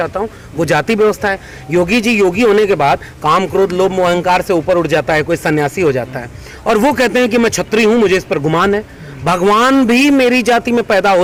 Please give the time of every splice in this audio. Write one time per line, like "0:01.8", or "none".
none